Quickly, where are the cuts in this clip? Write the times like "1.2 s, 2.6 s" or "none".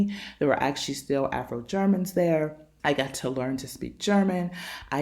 2.7 s